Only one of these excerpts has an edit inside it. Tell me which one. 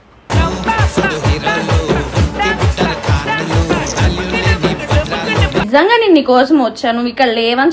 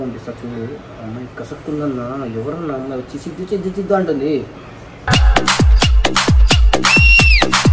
first; 1 cut; at 5.7 s

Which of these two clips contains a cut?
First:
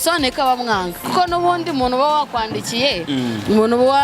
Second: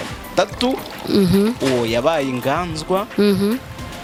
first; 1 cut; at 1.0 s

